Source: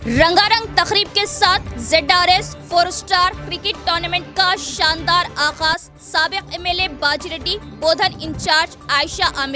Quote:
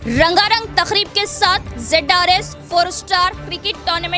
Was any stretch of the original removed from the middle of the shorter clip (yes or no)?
no